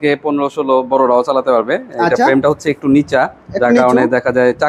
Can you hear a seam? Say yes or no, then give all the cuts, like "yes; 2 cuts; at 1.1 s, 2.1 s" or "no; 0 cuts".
no; 0 cuts